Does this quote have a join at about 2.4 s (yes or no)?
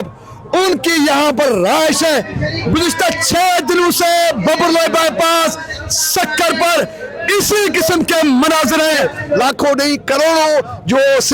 yes